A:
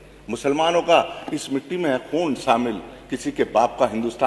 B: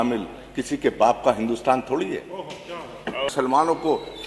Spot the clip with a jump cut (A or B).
B